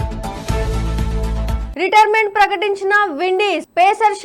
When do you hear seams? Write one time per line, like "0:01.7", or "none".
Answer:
0:01.6